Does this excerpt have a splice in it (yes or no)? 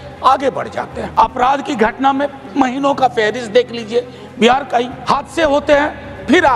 yes